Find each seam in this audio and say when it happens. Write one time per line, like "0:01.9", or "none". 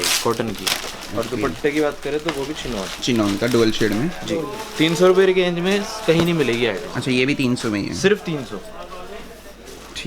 none